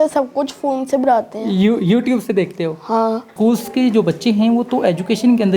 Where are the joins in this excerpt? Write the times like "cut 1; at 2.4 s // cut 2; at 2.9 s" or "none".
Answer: cut 1; at 3.3 s